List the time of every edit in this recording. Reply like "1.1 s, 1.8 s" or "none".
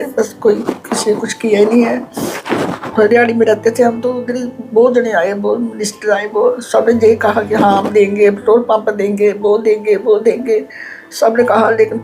none